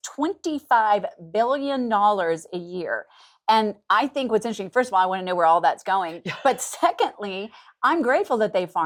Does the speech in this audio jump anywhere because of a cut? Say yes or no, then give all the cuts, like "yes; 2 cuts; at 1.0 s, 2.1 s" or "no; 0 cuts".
no; 0 cuts